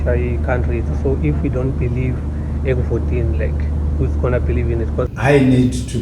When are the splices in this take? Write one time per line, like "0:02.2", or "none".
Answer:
0:05.1